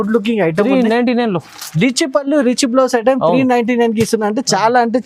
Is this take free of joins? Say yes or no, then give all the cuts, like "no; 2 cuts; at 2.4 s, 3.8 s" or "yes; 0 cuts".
yes; 0 cuts